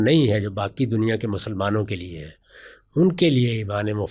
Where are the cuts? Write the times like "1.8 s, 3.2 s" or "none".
none